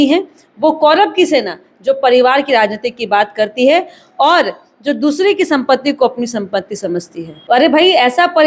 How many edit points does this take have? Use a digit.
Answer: 1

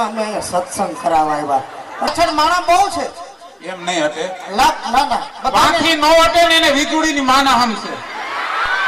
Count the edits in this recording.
1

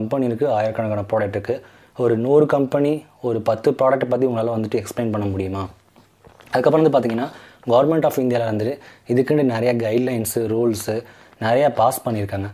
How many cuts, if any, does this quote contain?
0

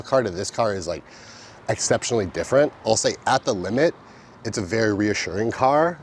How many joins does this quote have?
0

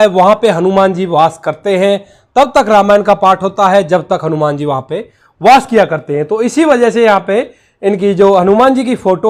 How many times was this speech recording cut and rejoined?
0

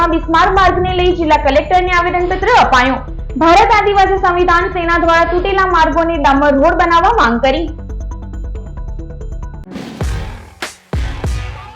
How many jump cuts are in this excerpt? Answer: 1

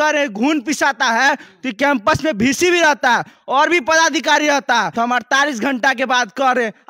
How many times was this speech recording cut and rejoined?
1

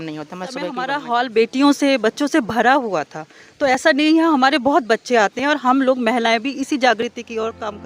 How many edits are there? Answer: 1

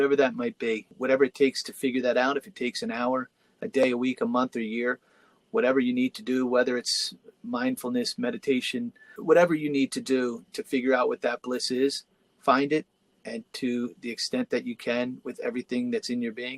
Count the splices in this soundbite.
2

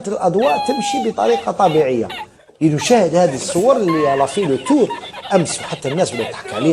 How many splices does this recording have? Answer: 0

